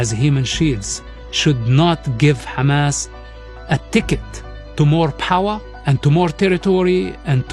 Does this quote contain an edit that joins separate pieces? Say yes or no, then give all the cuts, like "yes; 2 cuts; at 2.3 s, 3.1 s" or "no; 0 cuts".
no; 0 cuts